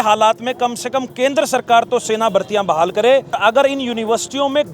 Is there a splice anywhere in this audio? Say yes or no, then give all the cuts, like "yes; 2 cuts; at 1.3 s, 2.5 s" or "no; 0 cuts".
yes; 1 cut; at 3.4 s